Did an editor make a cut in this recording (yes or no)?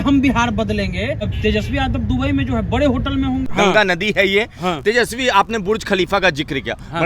yes